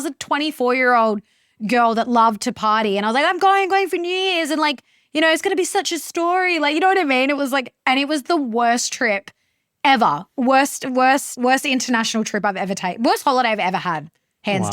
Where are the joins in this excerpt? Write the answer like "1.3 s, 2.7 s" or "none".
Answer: 11.3 s